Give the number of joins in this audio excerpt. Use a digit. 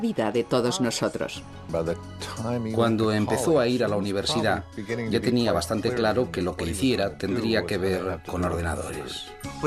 0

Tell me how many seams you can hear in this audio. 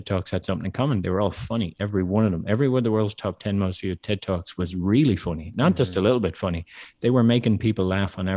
0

